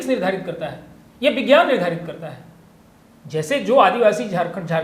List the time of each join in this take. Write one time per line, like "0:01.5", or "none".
none